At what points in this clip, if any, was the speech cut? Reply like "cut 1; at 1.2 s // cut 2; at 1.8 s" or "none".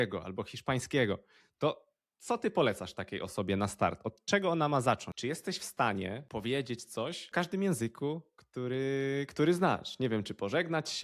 cut 1; at 5.1 s // cut 2; at 6.2 s // cut 3; at 7.3 s